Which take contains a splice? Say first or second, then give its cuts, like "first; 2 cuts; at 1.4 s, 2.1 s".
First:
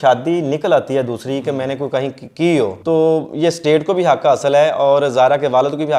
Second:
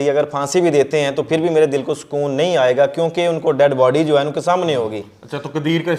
first; 1 cut; at 2.8 s